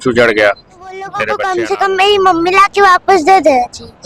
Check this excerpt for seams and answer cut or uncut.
cut